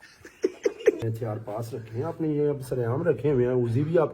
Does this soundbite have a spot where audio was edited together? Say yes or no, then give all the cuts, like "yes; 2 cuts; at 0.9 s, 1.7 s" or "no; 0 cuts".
yes; 1 cut; at 1.0 s